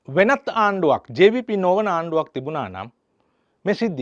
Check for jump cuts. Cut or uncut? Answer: uncut